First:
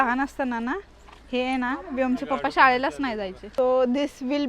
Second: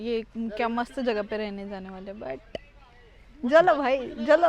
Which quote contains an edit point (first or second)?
first